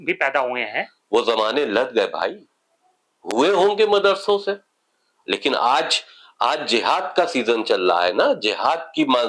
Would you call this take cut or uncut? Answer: uncut